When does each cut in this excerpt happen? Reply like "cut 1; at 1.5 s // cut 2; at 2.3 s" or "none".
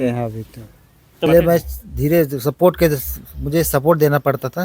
cut 1; at 1.3 s